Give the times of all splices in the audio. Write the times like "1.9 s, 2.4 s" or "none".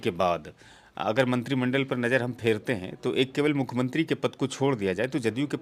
none